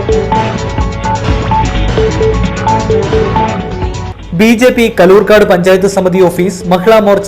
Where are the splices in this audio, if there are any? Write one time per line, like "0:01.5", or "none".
0:03.9